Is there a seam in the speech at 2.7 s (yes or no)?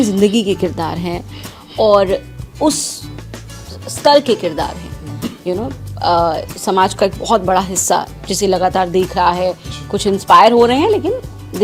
no